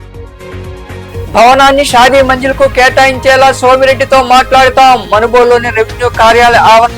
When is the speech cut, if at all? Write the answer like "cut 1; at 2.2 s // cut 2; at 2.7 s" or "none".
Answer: cut 1; at 1.2 s